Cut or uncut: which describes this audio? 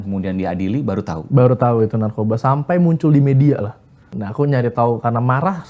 cut